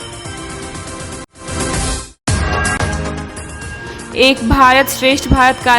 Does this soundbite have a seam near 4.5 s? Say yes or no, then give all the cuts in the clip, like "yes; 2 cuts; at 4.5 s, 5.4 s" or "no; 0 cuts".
no; 2 cuts; at 2.1 s, 3.2 s